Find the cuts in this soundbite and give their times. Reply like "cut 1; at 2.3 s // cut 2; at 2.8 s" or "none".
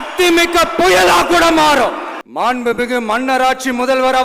cut 1; at 2.1 s